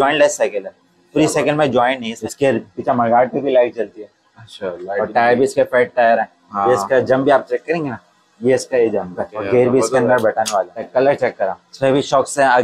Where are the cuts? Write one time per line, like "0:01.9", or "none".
0:02.1
0:09.4
0:10.9
0:11.6